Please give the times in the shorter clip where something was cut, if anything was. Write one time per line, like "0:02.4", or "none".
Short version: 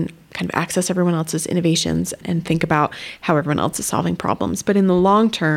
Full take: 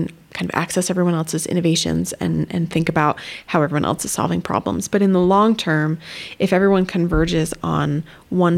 0:02.2